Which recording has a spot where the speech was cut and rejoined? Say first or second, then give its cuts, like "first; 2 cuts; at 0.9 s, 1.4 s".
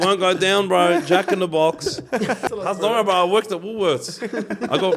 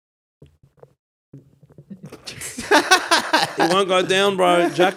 first; 1 cut; at 2.4 s